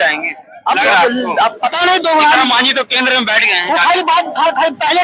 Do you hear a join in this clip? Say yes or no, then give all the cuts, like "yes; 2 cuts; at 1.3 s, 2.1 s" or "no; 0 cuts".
no; 0 cuts